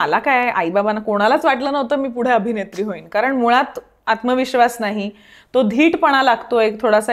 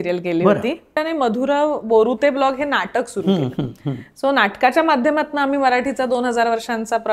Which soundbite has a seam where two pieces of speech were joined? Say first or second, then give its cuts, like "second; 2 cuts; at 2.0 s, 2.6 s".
second; 1 cut; at 1.0 s